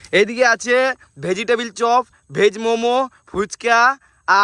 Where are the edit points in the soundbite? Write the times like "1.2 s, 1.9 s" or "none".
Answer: none

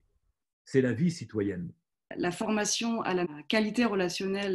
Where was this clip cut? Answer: 2.1 s, 3.3 s

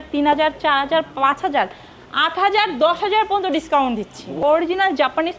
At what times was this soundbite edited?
4.4 s

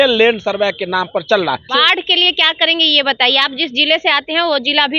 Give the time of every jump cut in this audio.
1.6 s

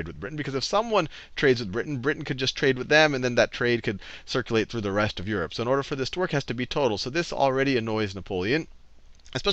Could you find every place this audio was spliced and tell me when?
none

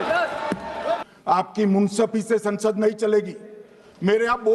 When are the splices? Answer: 1.1 s

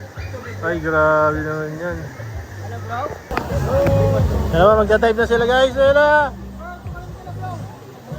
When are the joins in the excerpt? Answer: 3.3 s

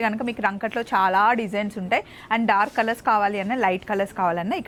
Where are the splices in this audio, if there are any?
none

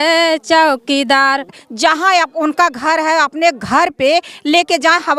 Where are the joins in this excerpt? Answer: 1.6 s

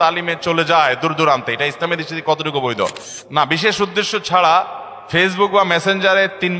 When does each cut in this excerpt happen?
3.1 s

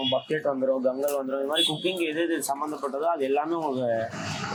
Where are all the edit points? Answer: none

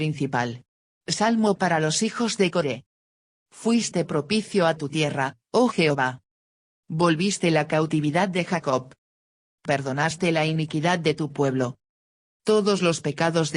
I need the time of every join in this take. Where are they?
3.1 s, 5.4 s

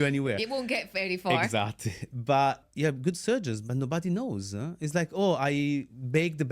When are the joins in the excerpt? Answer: 2.6 s

